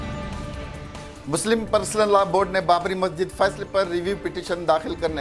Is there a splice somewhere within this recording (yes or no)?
yes